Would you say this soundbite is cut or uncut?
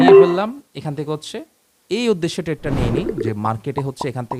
uncut